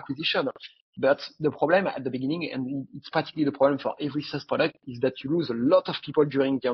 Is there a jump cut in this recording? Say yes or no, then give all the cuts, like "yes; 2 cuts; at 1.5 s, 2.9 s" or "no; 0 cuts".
no; 0 cuts